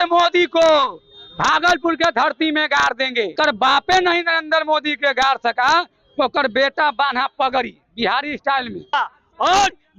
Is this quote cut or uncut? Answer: cut